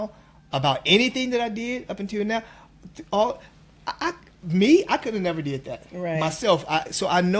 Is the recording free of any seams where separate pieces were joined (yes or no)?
yes